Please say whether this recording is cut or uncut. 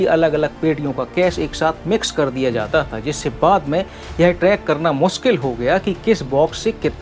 uncut